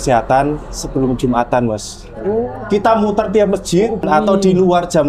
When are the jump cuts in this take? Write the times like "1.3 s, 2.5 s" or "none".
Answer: 4.0 s